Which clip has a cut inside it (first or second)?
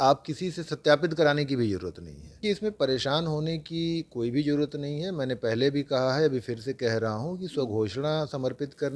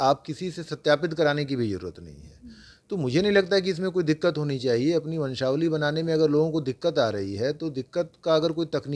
first